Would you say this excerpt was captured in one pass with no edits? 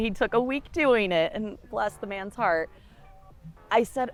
yes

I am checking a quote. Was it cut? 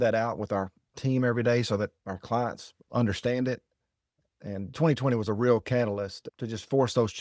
yes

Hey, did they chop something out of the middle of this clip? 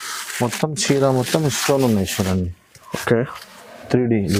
no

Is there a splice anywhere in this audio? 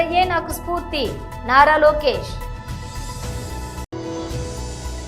no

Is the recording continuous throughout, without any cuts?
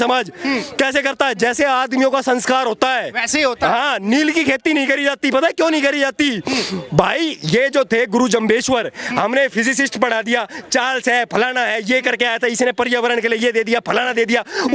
yes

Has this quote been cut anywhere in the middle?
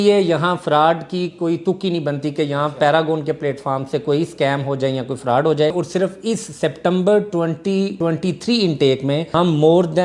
yes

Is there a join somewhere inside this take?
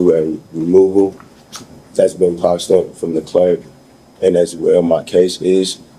no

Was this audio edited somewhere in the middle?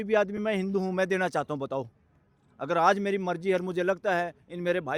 no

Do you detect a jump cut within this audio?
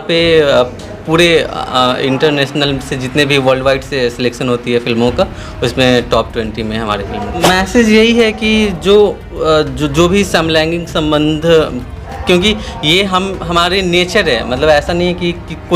yes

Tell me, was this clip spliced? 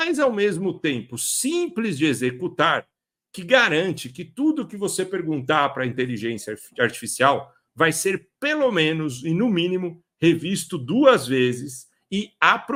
no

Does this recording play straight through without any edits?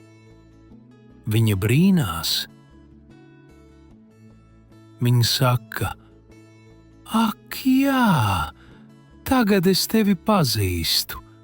no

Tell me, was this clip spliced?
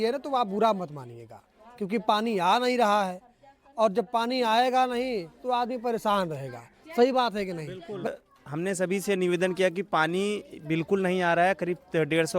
yes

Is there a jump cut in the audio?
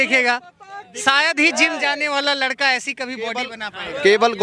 no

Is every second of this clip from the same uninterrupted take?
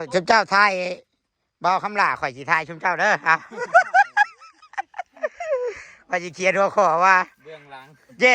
yes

